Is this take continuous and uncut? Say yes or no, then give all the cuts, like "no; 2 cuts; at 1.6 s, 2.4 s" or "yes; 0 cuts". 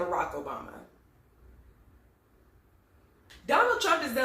no; 1 cut; at 3.3 s